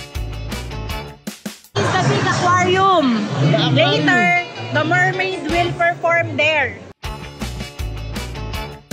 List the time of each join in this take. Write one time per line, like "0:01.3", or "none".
0:01.7